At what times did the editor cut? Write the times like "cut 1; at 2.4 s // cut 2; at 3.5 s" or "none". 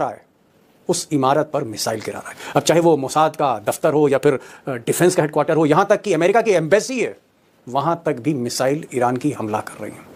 none